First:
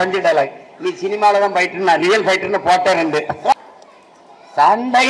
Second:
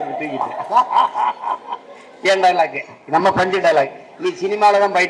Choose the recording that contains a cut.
first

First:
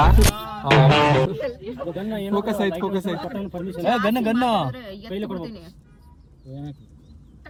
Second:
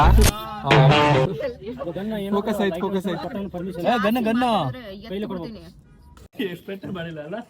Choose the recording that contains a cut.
second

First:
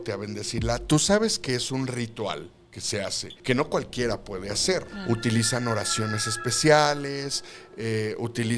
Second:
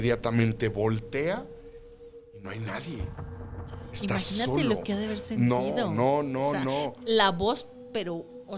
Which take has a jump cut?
first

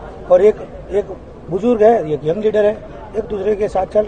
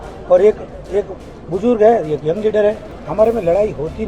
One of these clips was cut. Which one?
second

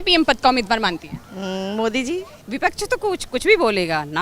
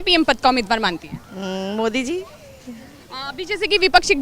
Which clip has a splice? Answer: first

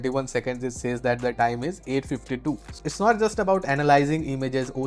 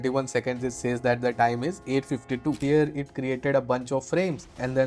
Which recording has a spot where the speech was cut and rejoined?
second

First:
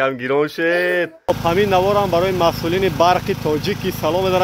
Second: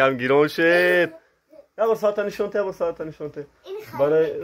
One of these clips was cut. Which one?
first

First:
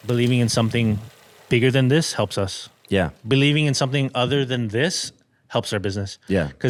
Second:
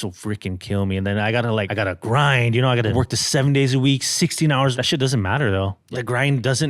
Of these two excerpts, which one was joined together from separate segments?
second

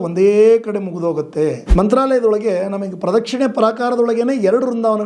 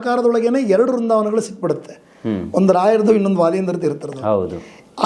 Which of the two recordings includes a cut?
first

